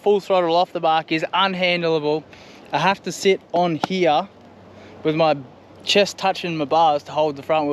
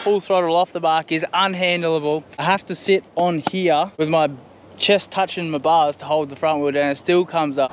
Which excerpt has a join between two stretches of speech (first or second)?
second